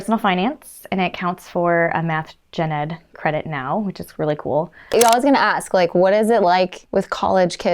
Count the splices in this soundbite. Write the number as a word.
two